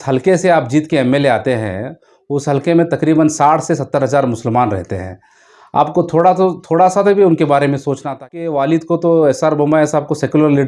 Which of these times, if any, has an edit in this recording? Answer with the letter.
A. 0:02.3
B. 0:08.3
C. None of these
B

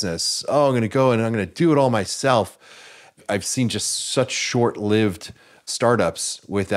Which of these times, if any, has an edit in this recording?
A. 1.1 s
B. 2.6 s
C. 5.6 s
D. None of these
C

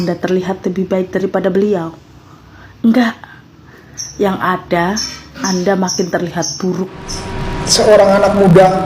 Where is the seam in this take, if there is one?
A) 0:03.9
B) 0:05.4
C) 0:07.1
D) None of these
C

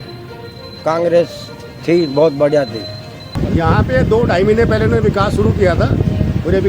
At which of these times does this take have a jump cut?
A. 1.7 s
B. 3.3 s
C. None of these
B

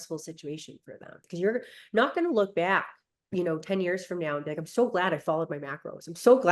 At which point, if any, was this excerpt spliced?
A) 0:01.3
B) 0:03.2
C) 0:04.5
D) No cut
A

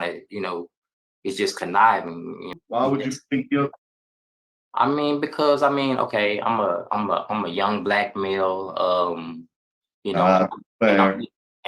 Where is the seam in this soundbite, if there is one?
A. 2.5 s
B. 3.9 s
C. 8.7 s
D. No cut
A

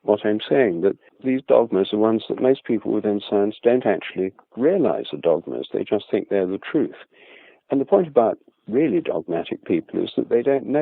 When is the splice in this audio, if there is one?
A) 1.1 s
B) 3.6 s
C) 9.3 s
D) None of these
A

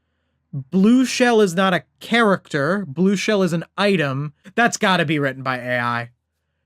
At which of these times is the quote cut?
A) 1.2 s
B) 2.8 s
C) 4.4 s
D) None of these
C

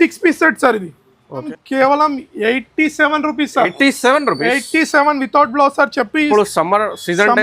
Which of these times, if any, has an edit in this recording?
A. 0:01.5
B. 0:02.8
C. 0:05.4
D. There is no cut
A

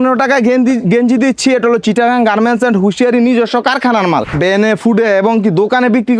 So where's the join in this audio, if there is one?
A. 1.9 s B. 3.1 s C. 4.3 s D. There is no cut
C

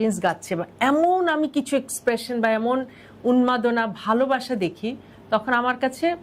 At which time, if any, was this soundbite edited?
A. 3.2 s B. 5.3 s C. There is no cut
C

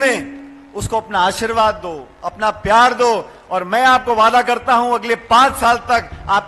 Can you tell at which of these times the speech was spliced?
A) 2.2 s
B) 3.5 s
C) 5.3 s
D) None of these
D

